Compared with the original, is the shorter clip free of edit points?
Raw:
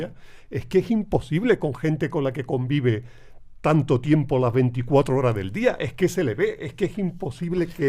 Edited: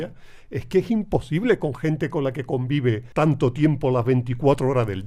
no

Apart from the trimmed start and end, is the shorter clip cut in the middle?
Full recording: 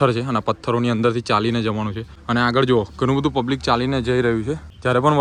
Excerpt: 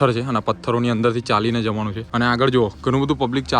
yes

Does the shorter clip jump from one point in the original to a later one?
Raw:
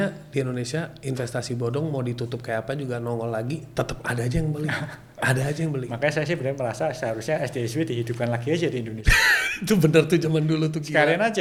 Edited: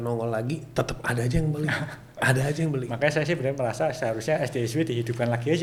no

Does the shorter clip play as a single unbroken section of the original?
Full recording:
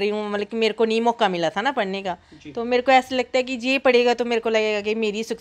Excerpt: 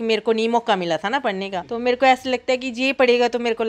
no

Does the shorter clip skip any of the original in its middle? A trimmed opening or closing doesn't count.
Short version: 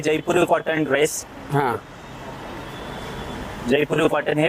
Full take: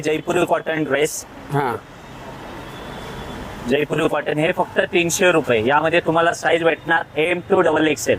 no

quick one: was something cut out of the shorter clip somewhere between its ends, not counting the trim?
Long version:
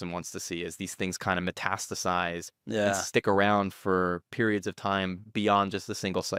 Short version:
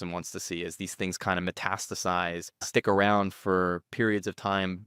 yes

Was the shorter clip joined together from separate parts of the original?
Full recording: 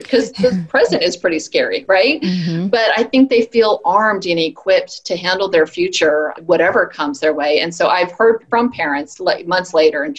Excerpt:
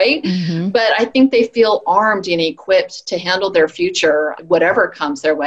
no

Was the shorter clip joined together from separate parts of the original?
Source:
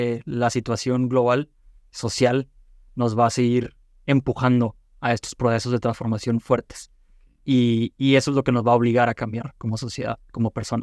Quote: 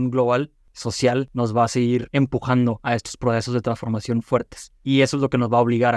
yes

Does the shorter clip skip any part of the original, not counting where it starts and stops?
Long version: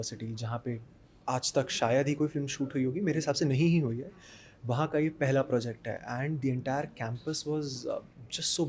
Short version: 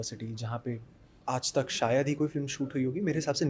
no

